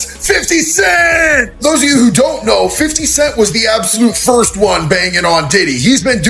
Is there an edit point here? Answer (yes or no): no